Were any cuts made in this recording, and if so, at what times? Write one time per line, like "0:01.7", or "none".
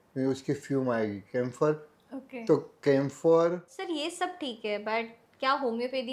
0:03.7